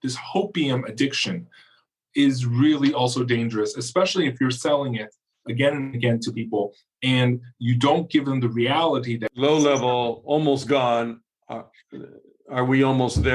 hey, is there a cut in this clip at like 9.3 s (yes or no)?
yes